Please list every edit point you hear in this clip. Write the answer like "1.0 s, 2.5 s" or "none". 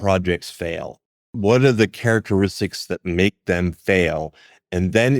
1.2 s